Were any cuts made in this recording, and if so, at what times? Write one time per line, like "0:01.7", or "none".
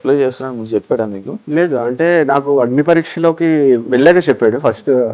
0:01.3